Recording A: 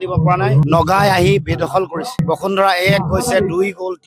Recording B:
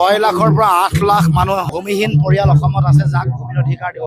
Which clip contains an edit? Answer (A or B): A